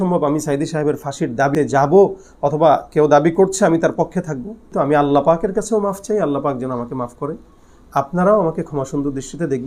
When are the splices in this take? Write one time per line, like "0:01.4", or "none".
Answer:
0:01.5
0:04.7